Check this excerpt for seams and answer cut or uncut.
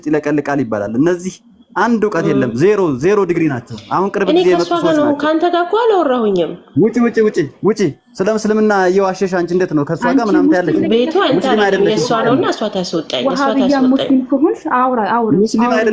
uncut